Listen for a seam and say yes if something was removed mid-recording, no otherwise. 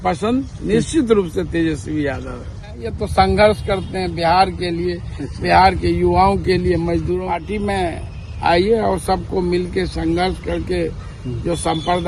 yes